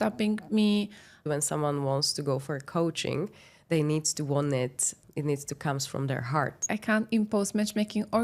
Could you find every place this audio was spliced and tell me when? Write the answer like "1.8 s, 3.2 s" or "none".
1.3 s, 6.6 s